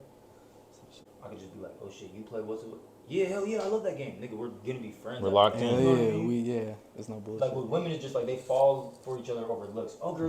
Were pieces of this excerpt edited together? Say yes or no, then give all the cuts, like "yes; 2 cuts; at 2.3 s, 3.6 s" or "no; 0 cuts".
yes; 1 cut; at 1.0 s